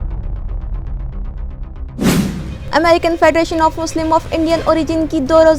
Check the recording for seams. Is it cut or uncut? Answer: cut